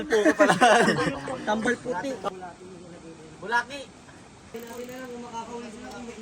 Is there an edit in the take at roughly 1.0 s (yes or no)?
no